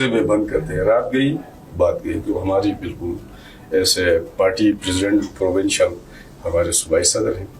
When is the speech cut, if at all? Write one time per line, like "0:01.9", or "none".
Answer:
none